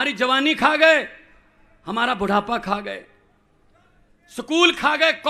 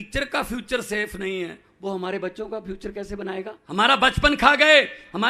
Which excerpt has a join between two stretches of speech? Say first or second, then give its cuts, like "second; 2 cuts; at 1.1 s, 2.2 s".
second; 1 cut; at 3.6 s